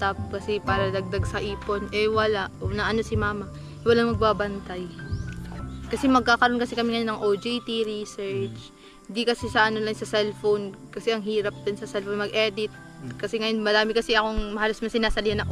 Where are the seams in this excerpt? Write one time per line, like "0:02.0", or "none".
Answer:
0:05.6